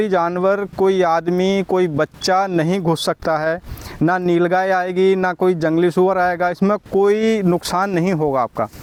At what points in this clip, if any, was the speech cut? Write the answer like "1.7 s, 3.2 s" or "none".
none